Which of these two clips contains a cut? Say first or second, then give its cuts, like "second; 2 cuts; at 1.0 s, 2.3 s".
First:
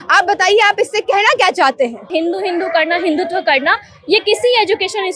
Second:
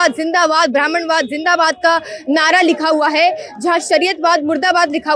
first; 1 cut; at 2.0 s